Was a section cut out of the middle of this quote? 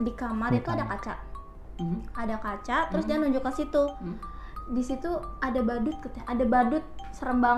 no; 0 cuts

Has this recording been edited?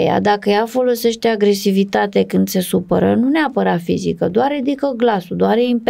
no; 0 cuts

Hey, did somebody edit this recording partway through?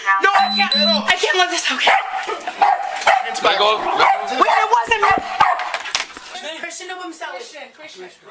no; 0 cuts

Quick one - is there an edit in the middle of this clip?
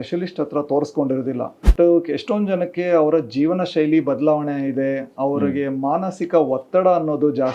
yes; 1 cut; at 1.6 s

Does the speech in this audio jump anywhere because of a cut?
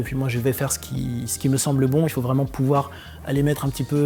no; 0 cuts

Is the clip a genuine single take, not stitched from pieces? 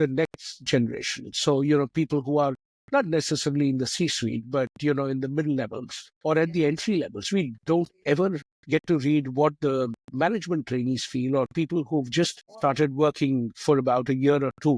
yes; 0 cuts

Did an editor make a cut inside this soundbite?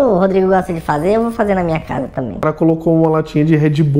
yes; 1 cut; at 2.4 s

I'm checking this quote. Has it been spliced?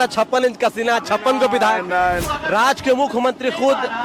yes; 1 cut; at 2.2 s

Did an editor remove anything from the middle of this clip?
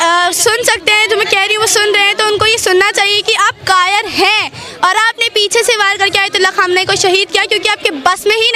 no; 0 cuts

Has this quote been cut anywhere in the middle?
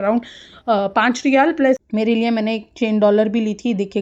yes; 1 cut; at 1.8 s

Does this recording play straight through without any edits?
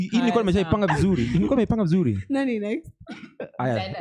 yes; 0 cuts

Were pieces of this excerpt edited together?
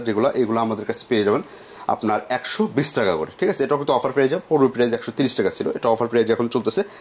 no; 0 cuts

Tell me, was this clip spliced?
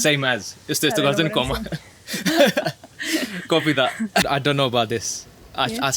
yes; 1 cut; at 4.3 s

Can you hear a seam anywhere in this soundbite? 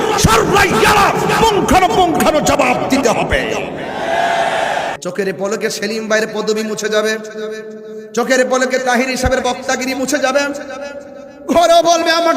yes; 1 cut; at 5.0 s

